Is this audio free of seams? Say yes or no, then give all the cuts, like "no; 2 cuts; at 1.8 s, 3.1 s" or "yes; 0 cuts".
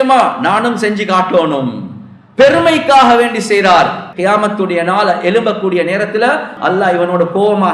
no; 2 cuts; at 4.0 s, 6.5 s